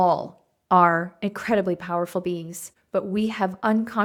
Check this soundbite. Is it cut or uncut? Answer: uncut